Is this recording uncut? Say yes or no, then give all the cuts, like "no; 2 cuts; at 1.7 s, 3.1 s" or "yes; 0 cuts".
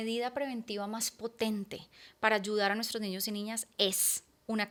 yes; 0 cuts